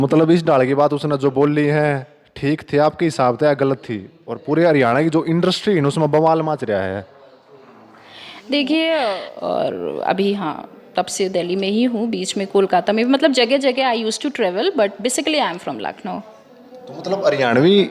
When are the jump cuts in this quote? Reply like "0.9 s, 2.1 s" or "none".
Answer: 9.3 s